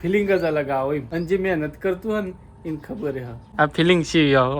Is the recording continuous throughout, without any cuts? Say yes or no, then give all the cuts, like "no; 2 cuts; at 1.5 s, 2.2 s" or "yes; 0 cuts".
no; 2 cuts; at 1.1 s, 3.4 s